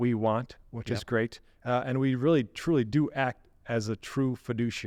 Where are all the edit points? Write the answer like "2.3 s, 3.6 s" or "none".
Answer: none